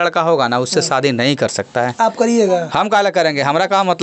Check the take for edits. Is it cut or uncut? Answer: uncut